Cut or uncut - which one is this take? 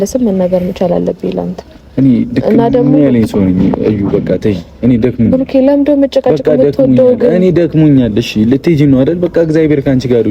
uncut